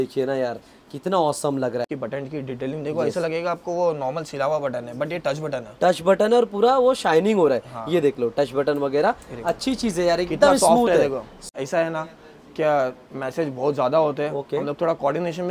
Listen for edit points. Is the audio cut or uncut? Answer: cut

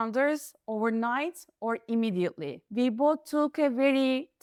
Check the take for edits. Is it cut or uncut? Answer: uncut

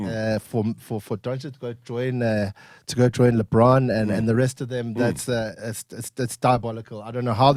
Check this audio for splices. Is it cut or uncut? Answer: uncut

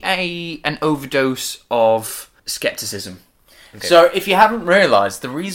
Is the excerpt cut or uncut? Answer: cut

